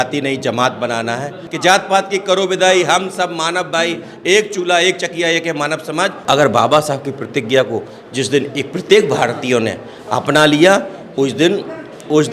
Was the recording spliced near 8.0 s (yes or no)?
no